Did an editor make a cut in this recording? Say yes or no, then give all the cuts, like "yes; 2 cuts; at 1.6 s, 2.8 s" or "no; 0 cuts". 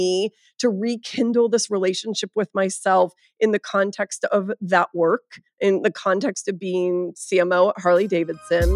no; 0 cuts